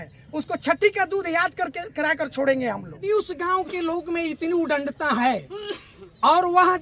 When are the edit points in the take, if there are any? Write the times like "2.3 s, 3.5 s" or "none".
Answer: 3.1 s